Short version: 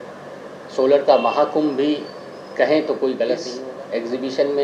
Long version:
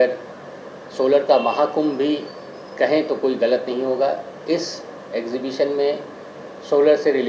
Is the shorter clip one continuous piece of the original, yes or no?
no